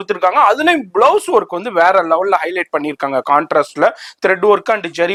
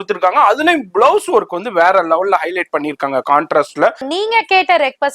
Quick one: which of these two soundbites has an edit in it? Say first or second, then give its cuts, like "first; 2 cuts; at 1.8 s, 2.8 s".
second; 1 cut; at 4.1 s